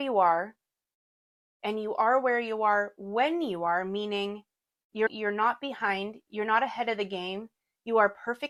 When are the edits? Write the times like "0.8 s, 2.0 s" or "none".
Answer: none